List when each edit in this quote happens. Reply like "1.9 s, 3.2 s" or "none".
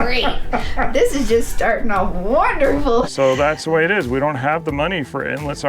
3.1 s